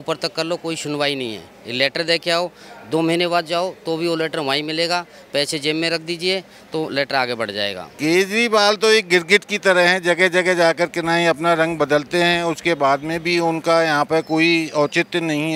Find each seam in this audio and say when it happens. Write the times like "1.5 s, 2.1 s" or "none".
7.9 s